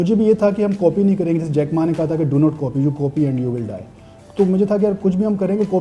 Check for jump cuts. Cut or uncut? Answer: uncut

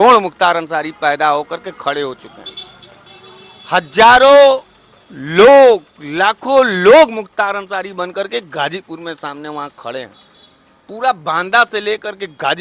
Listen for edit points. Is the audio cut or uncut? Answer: uncut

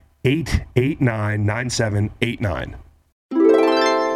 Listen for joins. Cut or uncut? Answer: cut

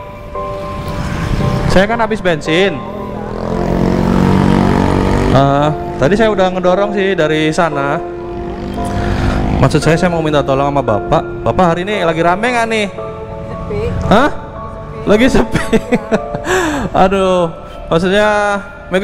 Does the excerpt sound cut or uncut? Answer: uncut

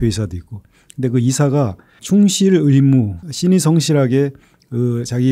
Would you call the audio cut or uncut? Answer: cut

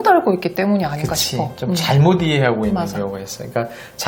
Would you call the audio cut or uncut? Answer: uncut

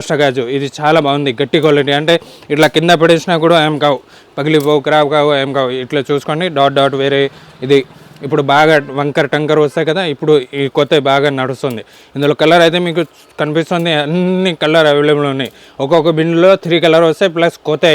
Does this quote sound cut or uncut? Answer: uncut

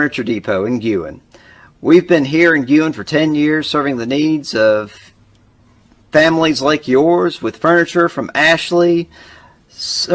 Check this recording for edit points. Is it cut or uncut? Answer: uncut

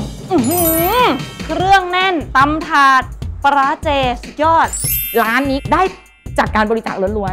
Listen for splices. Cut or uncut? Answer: uncut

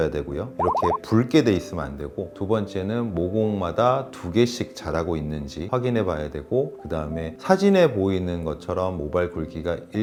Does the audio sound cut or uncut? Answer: uncut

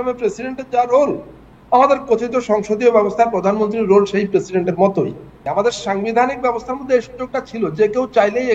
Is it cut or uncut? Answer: cut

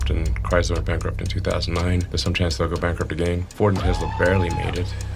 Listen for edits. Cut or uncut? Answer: cut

